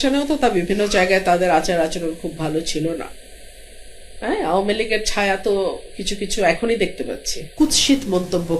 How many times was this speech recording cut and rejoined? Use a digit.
1